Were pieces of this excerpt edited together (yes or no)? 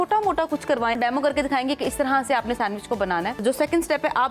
yes